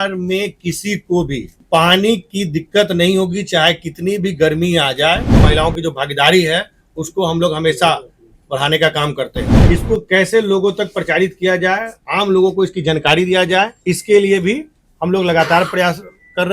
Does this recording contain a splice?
yes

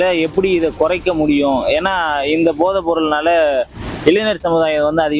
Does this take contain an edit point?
no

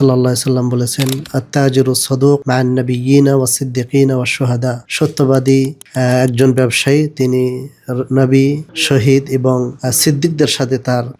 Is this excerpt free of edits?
yes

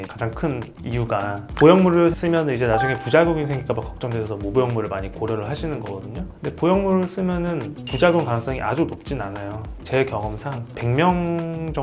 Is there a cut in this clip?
yes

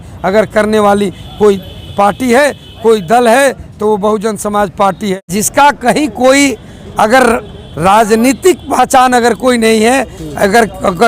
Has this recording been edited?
yes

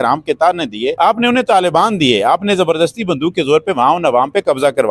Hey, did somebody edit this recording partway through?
yes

